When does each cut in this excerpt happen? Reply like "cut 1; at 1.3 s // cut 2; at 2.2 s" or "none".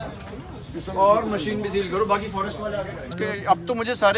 cut 1; at 3.1 s